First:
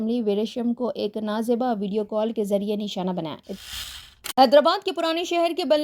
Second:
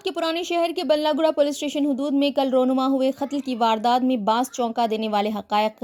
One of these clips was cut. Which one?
first; 1 cut; at 3.6 s

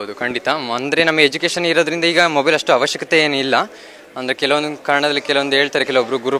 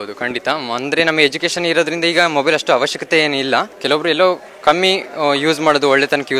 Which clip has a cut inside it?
second; 1 cut; at 3.7 s

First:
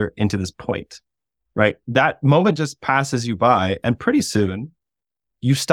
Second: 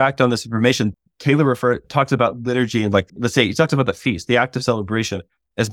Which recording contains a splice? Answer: second; 3 cuts; at 0.9 s, 1.8 s, 3.1 s

